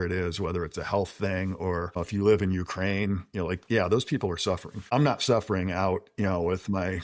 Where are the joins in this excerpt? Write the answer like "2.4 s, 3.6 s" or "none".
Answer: 2.0 s, 4.7 s